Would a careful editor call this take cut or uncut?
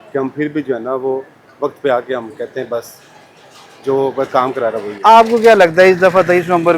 uncut